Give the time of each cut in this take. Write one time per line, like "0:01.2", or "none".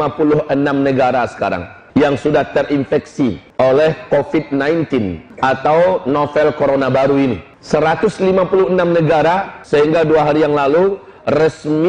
0:01.7
0:03.4
0:05.2
0:07.5
0:09.5